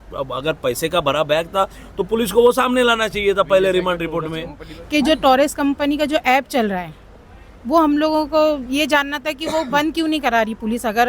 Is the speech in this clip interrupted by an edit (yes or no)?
yes